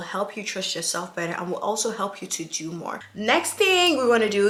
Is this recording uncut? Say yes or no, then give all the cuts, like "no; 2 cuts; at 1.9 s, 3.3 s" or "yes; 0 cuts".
yes; 0 cuts